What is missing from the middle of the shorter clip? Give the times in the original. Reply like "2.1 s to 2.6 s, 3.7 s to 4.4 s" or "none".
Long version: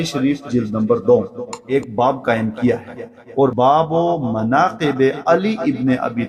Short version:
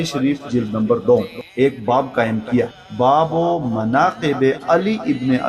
1.4 s to 1.5 s, 3.1 s to 3.5 s